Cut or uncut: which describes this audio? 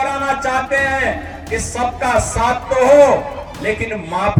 uncut